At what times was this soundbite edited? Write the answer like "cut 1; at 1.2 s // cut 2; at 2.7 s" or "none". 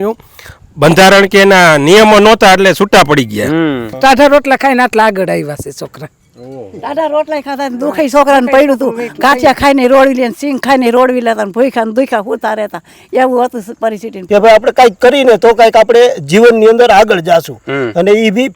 cut 1; at 4.0 s // cut 2; at 14.2 s